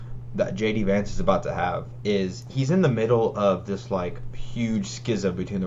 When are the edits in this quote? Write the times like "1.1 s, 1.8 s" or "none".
none